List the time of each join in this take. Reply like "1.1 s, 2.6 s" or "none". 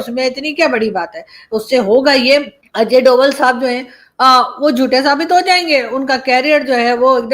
2.6 s

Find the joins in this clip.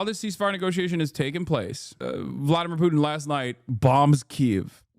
1.9 s

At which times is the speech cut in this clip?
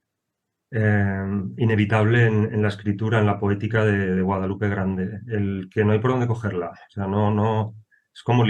none

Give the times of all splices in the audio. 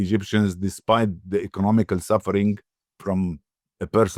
none

